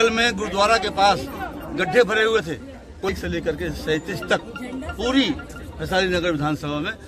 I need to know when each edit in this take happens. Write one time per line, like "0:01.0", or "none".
0:03.1